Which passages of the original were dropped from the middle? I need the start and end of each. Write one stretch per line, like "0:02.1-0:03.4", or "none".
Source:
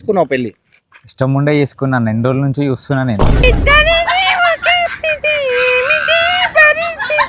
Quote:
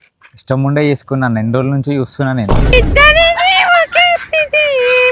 none